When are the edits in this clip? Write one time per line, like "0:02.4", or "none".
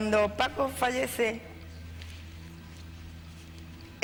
none